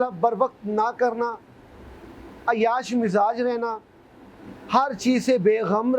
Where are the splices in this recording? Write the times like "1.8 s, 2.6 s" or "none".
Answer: none